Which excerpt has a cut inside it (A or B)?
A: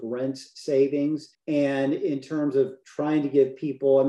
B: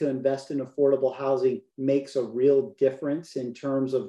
A